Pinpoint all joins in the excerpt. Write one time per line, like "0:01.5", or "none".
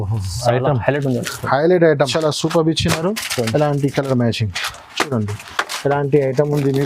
0:02.1